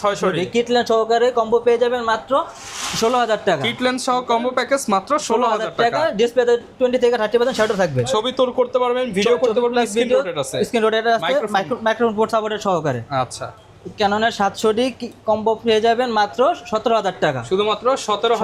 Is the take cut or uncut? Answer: uncut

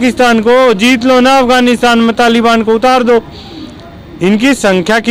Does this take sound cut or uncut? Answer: uncut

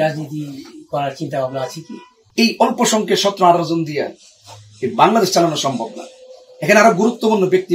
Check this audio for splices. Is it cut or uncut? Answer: cut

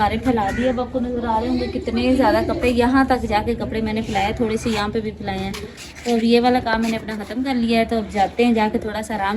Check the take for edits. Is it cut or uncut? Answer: uncut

